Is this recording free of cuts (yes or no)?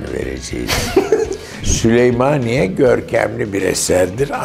no